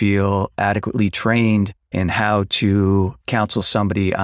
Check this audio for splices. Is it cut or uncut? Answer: cut